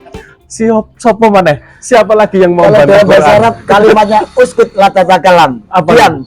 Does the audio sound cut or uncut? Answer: uncut